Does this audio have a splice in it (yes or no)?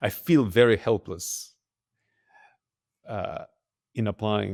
no